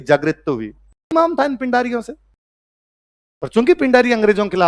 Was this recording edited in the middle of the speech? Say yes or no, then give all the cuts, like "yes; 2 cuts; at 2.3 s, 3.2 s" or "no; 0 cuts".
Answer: yes; 1 cut; at 1.1 s